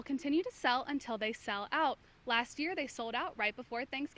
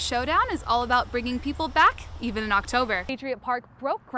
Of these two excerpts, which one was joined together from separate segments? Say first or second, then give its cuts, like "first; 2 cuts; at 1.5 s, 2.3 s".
second; 1 cut; at 3.1 s